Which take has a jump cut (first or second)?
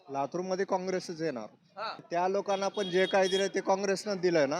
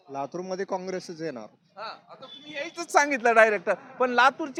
first